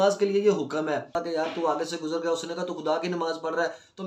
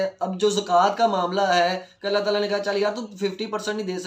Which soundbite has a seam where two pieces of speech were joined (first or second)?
first